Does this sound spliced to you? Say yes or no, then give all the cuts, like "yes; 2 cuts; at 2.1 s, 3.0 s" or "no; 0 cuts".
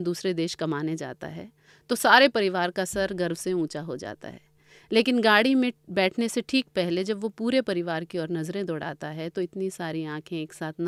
no; 0 cuts